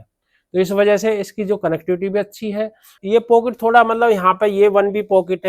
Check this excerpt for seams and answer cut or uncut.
cut